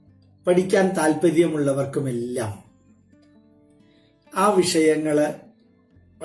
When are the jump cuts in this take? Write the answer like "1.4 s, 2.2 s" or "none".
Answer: 2.7 s, 4.3 s